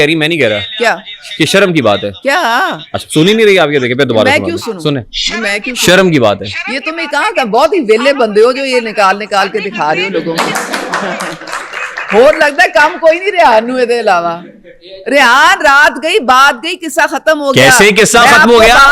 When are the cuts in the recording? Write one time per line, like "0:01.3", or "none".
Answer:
none